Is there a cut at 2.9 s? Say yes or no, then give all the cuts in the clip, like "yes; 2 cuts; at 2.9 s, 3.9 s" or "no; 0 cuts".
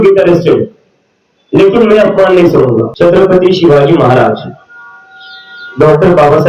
yes; 1 cut; at 2.9 s